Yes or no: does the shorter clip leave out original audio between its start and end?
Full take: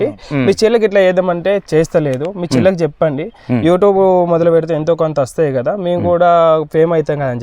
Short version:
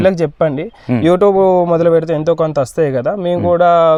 no